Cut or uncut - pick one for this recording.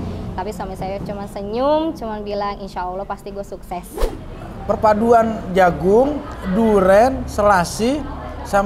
cut